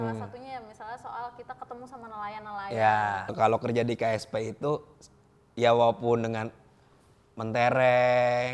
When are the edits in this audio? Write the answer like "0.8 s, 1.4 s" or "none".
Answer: 3.3 s

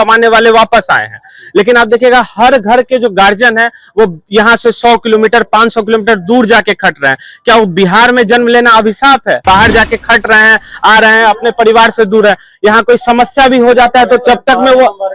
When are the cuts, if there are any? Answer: 9.4 s

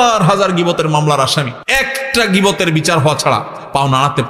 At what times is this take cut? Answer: 1.6 s

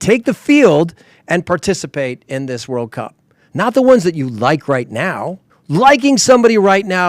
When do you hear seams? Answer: none

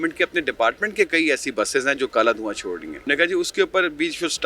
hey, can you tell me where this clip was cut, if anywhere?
2.9 s

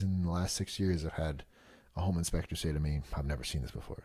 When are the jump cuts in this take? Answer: none

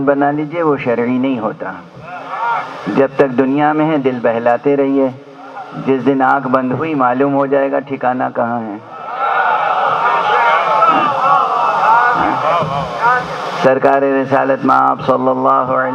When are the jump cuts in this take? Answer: none

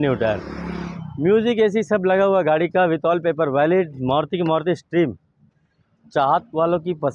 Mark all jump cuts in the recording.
none

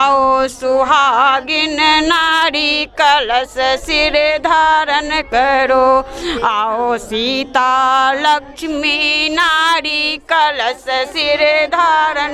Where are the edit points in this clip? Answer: none

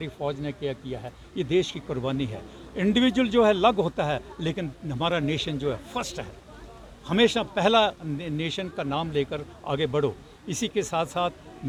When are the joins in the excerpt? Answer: none

